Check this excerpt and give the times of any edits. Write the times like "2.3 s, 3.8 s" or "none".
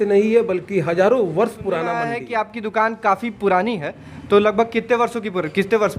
2.0 s